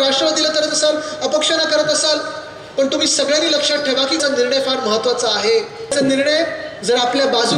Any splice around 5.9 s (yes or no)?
yes